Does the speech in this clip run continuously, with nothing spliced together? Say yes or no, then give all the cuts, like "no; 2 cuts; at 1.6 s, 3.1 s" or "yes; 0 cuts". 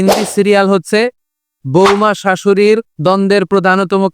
no; 1 cut; at 3.0 s